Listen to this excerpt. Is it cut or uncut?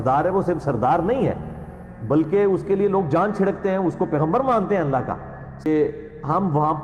cut